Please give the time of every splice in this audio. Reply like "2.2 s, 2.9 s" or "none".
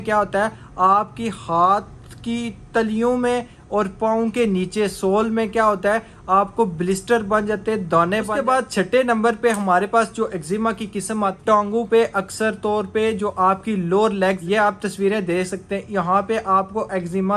8.3 s, 11.4 s, 14.4 s